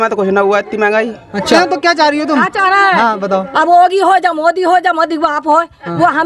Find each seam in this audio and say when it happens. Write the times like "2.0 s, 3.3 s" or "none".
1.4 s